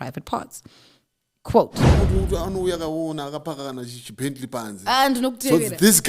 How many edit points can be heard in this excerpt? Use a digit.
1